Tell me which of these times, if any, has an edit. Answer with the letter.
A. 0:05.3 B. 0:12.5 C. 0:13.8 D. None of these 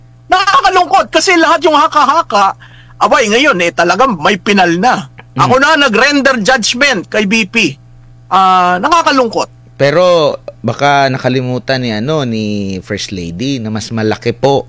D